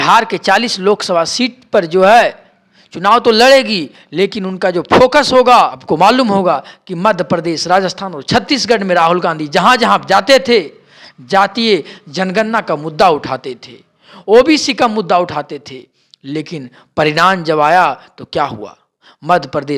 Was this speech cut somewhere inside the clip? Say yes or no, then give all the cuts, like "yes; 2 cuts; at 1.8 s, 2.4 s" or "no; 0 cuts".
yes; 1 cut; at 5.8 s